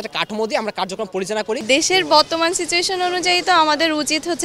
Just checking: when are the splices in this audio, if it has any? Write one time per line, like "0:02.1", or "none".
0:01.6